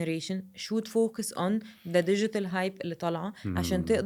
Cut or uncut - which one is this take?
uncut